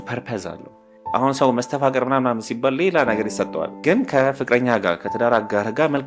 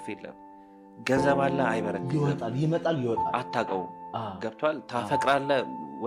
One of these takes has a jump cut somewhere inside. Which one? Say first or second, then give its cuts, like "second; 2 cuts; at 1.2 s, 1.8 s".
first; 2 cuts; at 0.9 s, 3.7 s